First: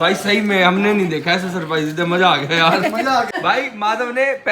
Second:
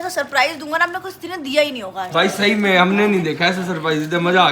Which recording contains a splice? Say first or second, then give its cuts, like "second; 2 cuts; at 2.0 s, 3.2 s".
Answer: first; 1 cut; at 3.3 s